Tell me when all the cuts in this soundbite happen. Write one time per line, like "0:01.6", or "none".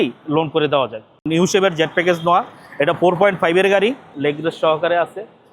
0:01.2
0:04.1